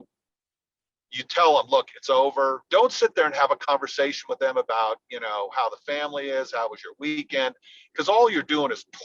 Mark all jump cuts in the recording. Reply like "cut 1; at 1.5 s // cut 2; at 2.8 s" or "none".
cut 1; at 2.6 s